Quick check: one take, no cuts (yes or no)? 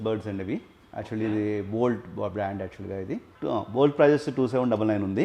no